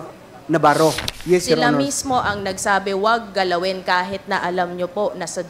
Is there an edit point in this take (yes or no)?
yes